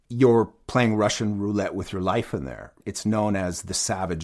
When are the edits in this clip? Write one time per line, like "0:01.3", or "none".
0:02.7